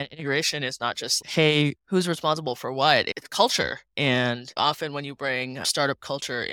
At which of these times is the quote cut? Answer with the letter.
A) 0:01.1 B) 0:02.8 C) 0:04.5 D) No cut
C